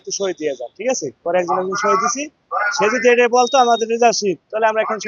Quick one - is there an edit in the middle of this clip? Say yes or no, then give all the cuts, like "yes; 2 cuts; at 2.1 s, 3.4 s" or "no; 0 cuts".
yes; 1 cut; at 1.2 s